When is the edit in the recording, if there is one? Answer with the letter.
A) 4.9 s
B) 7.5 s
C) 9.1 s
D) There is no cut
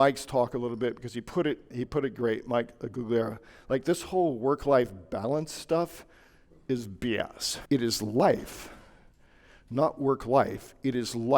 B